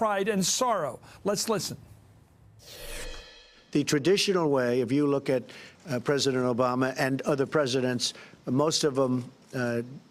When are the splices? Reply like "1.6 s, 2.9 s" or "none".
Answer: none